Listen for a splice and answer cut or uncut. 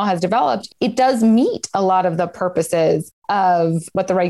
cut